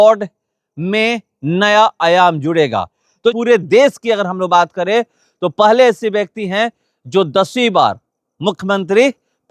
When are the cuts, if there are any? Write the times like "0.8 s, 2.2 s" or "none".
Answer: 3.3 s